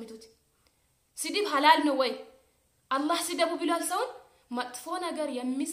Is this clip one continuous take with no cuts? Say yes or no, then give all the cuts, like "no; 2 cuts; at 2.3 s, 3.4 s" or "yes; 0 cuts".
yes; 0 cuts